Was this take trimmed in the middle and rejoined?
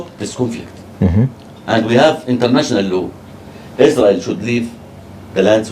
no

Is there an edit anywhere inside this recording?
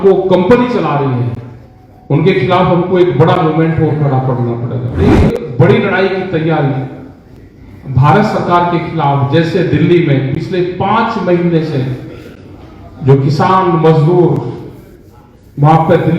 yes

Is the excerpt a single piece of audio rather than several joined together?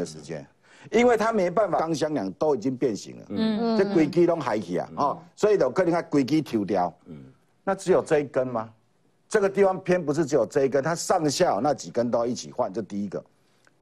yes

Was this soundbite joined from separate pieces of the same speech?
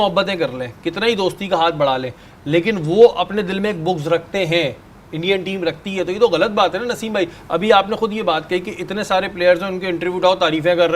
no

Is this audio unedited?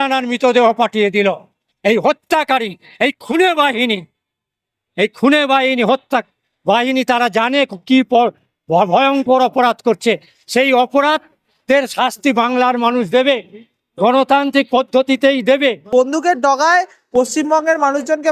no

